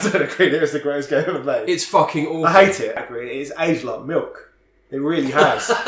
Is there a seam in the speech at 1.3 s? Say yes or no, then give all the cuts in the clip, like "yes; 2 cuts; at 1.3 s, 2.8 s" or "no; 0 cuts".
no; 1 cut; at 2.9 s